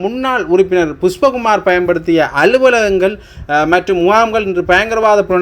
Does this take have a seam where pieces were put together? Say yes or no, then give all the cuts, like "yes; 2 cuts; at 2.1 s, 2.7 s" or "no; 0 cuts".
no; 0 cuts